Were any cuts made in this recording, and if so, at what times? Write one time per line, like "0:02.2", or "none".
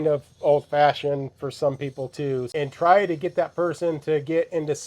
0:02.5

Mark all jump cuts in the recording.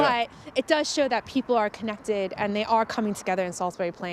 none

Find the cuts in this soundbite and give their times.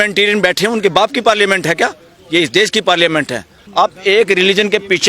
0:03.6

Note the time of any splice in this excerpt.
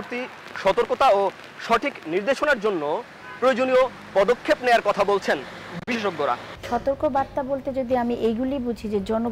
0:06.5

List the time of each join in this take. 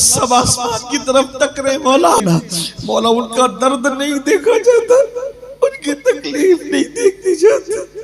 0:02.2

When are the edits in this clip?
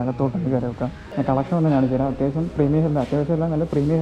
0:01.0

